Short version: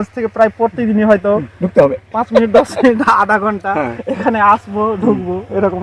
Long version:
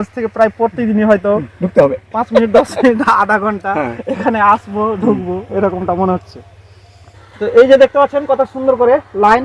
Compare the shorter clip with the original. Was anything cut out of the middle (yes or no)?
no